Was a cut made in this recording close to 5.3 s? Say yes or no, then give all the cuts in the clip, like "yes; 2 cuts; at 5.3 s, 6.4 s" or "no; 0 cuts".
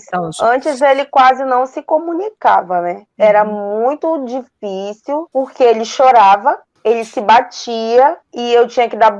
yes; 4 cuts; at 3.1 s, 5.3 s, 6.7 s, 8.3 s